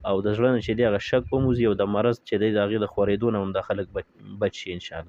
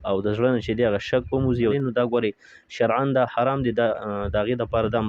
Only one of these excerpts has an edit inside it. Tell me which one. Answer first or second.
second